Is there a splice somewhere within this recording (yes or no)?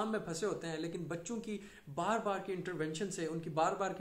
no